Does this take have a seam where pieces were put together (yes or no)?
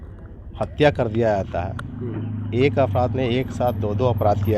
no